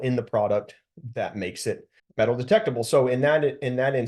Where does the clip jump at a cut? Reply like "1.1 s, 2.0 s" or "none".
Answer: 2.0 s